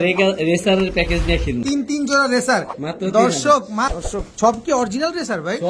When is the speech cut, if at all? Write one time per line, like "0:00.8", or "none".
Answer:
0:01.6
0:03.9